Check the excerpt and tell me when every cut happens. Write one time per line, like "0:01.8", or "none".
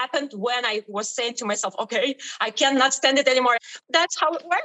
0:03.7